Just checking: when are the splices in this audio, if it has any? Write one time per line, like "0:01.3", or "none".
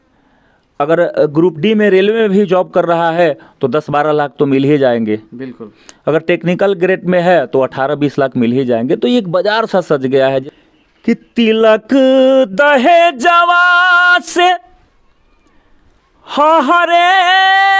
0:10.4